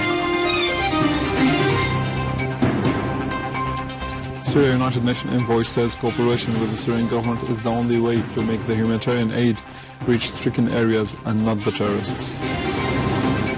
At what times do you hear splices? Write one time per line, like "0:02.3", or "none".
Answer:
none